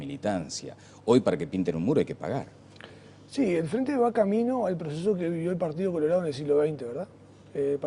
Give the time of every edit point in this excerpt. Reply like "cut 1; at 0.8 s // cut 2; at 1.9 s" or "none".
none